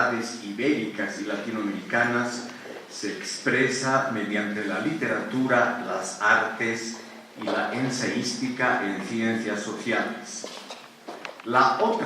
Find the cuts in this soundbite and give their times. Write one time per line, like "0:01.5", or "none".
0:03.2